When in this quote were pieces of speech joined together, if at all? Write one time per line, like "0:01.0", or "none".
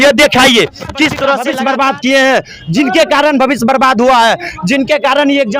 0:01.5

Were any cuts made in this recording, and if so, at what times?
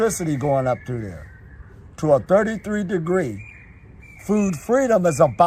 none

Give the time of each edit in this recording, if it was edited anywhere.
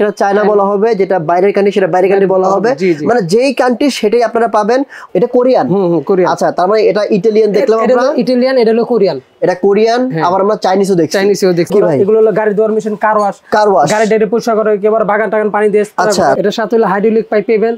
0:05.0
0:11.7
0:16.4

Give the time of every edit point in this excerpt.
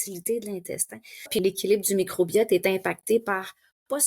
0:01.3

